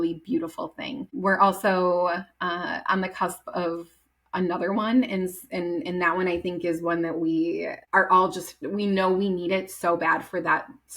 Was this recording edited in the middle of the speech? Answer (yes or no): yes